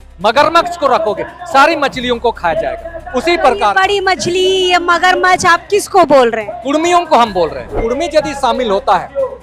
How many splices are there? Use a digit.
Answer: 1